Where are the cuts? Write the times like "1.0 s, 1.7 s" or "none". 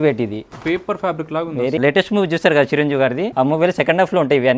1.8 s, 3.3 s